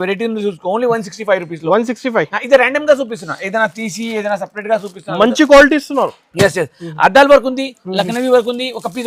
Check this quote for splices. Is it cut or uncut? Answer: uncut